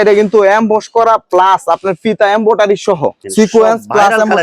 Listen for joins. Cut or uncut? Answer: cut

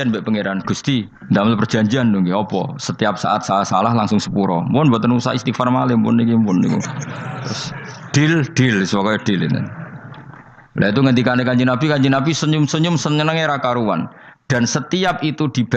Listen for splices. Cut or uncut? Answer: cut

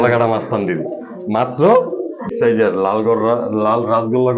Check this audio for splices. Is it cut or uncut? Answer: cut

